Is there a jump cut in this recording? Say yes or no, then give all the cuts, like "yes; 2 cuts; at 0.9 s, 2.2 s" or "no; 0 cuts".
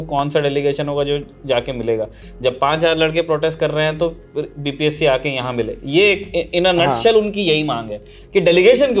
no; 0 cuts